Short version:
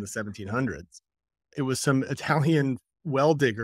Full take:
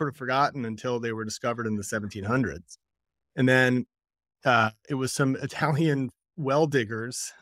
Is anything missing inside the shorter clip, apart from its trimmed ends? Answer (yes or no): yes